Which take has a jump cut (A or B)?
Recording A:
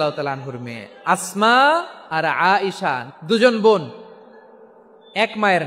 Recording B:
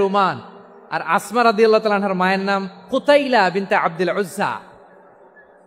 A